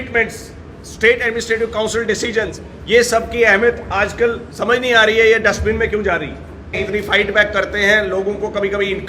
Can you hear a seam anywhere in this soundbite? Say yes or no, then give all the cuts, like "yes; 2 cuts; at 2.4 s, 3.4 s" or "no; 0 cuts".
yes; 1 cut; at 6.8 s